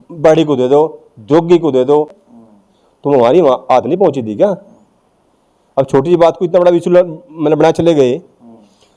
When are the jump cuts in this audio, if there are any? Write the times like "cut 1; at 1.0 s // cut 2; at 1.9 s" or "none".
none